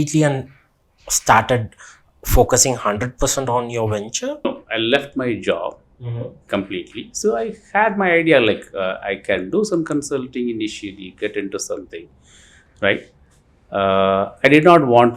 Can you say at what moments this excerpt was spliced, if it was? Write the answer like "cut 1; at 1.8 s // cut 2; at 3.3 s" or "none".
cut 1; at 4.4 s